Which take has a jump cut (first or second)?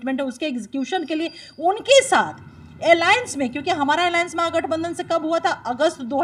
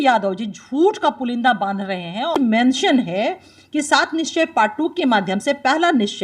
second